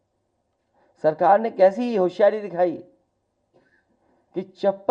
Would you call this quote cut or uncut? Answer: uncut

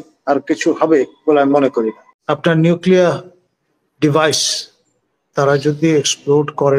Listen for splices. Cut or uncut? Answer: cut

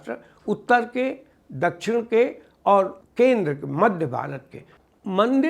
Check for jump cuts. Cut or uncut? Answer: cut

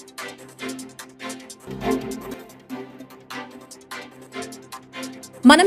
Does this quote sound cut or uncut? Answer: cut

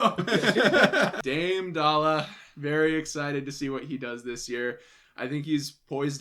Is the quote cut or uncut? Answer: cut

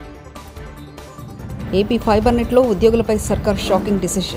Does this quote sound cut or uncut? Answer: uncut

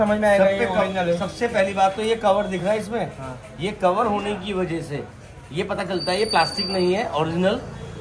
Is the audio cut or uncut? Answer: uncut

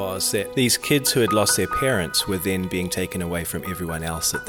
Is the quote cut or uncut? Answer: uncut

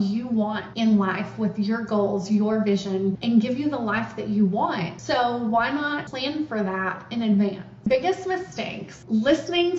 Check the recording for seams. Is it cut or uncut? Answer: cut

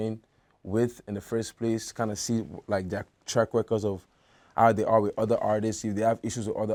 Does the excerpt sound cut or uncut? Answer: uncut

